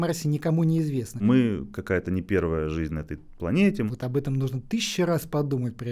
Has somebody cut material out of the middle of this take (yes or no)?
yes